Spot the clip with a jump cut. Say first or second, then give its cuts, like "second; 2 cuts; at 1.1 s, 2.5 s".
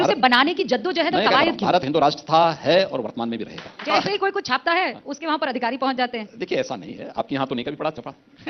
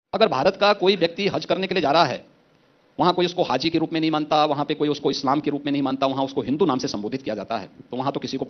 first; 1 cut; at 3.8 s